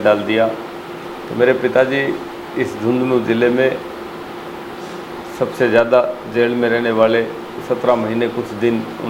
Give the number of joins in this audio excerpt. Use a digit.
0